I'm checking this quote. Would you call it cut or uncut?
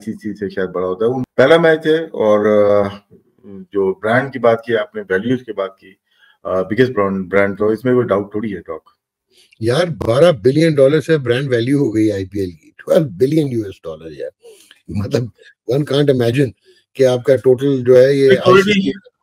uncut